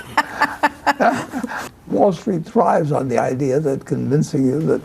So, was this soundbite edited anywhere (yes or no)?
yes